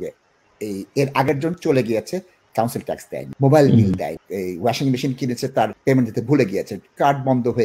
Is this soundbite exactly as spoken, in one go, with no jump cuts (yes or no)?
no